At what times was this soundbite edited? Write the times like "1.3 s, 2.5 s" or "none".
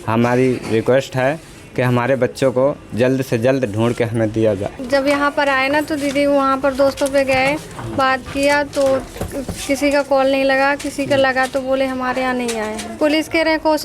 4.8 s, 12.8 s

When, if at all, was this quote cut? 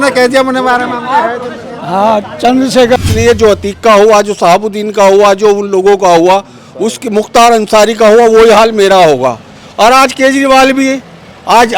3.0 s

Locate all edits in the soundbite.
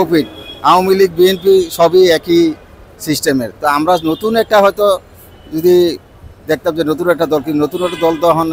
none

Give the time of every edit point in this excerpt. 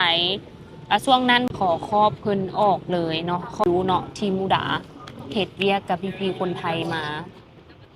1.5 s, 3.6 s

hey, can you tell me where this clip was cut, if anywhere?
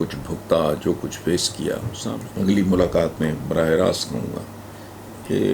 1.9 s

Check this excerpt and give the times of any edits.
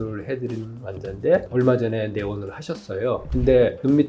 none

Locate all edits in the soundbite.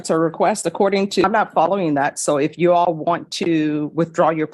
1.2 s

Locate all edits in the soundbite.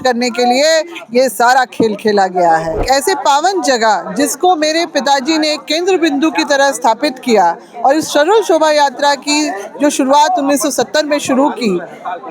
2.8 s

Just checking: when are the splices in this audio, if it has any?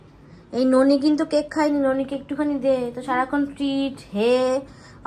none

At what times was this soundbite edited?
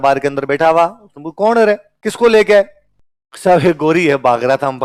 none

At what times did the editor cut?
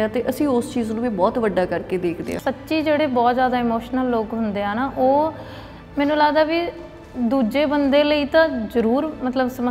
2.3 s

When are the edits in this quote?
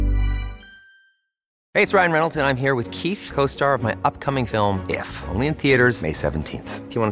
1.5 s

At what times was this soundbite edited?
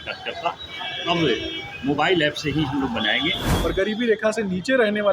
3.5 s

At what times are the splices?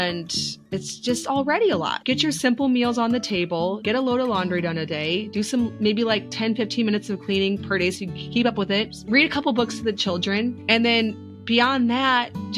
1.9 s, 3.8 s, 9.0 s, 10.6 s

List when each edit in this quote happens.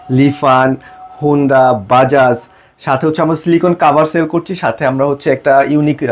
none

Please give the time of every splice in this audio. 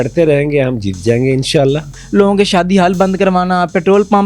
1.9 s

